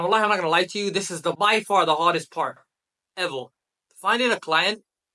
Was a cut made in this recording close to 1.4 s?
yes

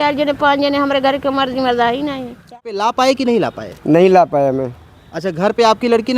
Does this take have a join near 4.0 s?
no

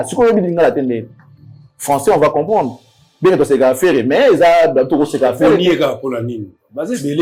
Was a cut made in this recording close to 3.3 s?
no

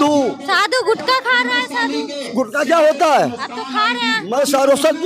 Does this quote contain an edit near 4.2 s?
yes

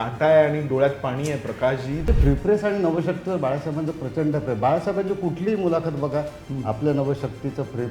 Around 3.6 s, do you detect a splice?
no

